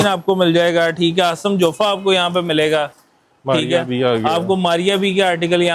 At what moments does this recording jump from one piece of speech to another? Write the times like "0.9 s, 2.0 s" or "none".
none